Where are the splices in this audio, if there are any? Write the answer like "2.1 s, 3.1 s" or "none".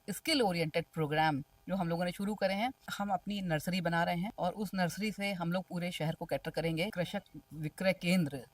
2.9 s, 4.3 s, 6.9 s